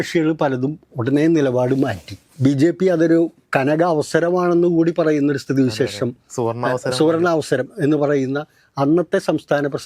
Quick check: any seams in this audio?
no; 0 cuts

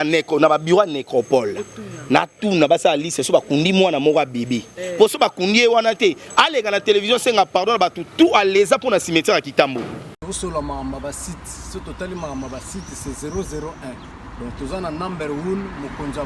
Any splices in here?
yes; 1 cut; at 10.3 s

